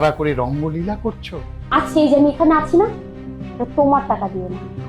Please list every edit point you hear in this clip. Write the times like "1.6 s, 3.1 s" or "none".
1.6 s